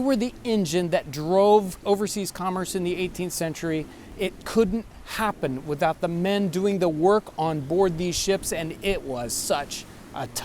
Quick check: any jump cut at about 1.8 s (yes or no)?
yes